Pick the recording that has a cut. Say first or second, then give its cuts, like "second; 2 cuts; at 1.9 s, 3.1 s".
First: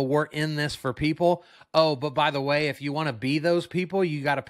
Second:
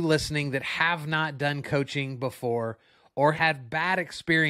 second; 1 cut; at 3.3 s